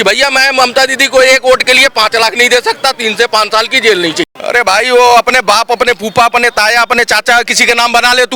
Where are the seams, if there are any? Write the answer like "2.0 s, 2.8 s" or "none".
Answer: 4.2 s